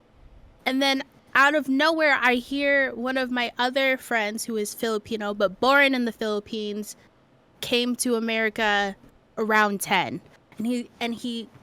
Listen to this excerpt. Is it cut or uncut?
uncut